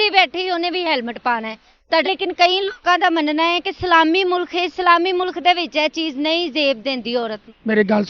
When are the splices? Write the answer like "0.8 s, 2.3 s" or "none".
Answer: 2.0 s

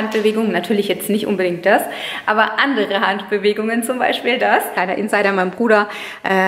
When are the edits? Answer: 4.8 s

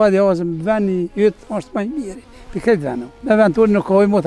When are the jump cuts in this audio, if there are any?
3.1 s

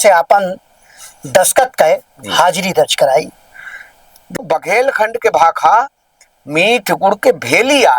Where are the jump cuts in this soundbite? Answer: 4.4 s

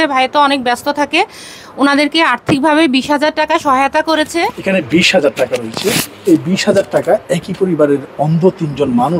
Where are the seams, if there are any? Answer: 4.6 s

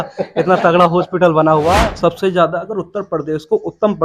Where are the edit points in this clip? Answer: 1.8 s

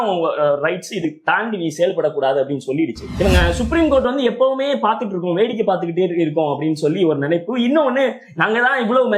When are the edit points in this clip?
3.0 s

